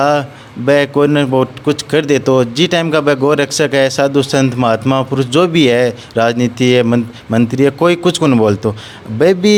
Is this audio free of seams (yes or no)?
yes